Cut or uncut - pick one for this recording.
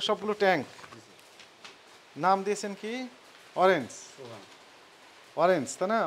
uncut